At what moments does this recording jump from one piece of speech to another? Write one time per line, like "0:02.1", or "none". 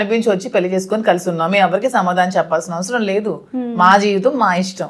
none